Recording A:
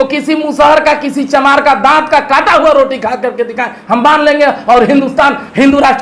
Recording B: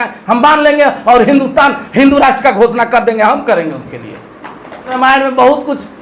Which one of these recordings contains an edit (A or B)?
B